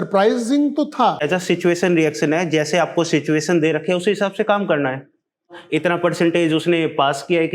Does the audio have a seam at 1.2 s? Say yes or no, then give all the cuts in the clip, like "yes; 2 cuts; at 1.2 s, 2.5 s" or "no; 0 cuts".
yes; 2 cuts; at 1.2 s, 5.6 s